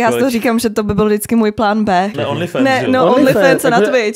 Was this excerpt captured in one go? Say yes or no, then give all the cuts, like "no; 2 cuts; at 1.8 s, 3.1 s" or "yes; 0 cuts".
no; 1 cut; at 2.1 s